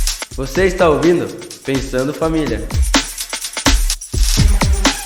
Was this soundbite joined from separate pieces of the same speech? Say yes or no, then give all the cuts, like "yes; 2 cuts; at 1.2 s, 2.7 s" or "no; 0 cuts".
no; 0 cuts